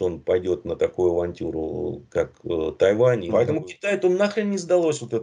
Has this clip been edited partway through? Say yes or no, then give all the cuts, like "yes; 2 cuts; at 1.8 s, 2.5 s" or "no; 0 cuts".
yes; 1 cut; at 3.2 s